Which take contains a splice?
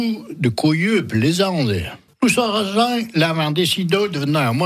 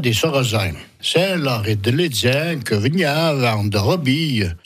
first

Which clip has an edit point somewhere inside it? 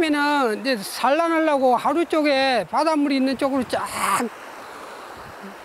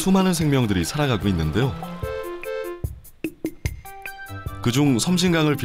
first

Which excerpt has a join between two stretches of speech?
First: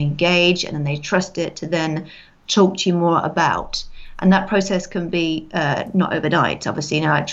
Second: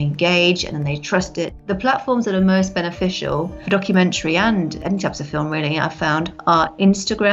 second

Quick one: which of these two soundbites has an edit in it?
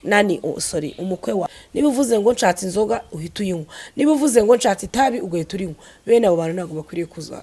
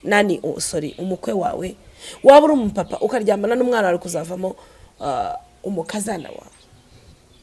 first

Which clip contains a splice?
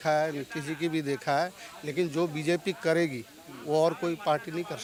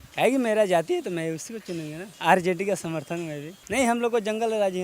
second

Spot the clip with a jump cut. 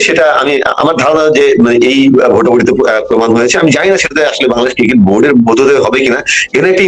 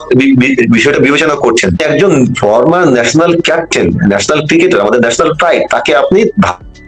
second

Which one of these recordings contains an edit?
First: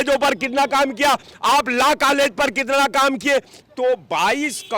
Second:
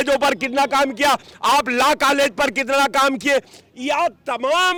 first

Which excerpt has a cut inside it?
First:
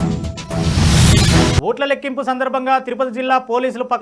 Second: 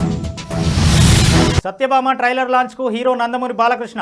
first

